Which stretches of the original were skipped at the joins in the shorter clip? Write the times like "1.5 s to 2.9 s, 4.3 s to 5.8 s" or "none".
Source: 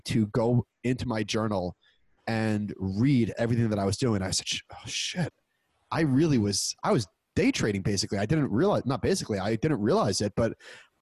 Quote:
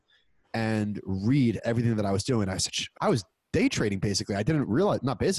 4.6 s to 6.7 s